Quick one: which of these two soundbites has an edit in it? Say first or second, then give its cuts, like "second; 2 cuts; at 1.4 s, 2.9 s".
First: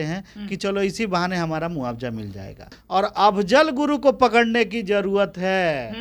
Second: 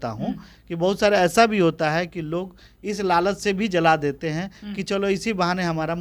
first; 1 cut; at 2.8 s